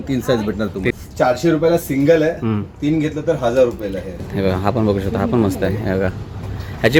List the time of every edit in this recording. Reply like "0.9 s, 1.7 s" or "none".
0.9 s, 4.2 s